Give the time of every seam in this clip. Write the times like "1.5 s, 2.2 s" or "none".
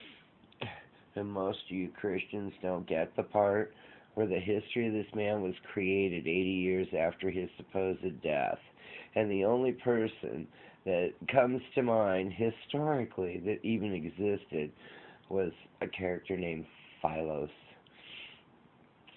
16.6 s